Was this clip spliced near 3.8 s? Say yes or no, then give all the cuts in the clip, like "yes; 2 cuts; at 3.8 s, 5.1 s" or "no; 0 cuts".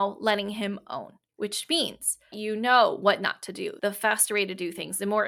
yes; 3 cuts; at 1.2 s, 2.3 s, 3.8 s